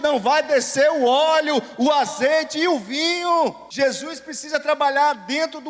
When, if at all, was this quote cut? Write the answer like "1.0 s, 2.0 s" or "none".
3.6 s